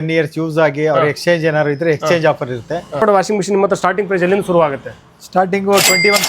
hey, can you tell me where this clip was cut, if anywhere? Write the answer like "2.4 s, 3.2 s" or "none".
3.0 s